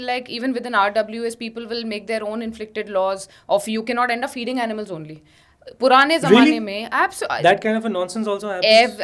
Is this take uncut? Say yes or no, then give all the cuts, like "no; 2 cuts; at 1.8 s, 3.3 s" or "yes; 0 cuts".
yes; 0 cuts